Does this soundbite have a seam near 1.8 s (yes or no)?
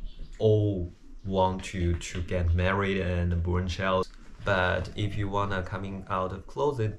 no